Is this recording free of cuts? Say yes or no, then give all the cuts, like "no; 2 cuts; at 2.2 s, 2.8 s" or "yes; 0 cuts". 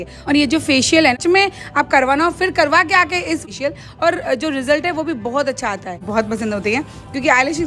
no; 3 cuts; at 1.2 s, 3.4 s, 6.0 s